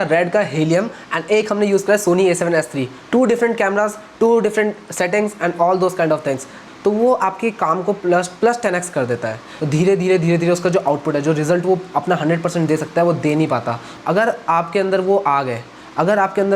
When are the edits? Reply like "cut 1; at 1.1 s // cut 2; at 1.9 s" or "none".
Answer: cut 1; at 6.6 s // cut 2; at 9.5 s // cut 3; at 13.9 s